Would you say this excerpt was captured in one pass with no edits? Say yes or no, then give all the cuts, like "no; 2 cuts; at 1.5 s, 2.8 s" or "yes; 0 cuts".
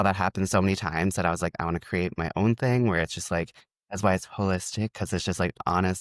yes; 0 cuts